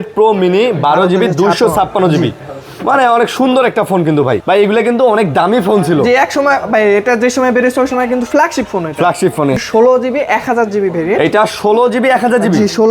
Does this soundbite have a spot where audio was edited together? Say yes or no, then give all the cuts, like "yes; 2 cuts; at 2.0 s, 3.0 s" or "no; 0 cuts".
yes; 2 cuts; at 4.4 s, 9.6 s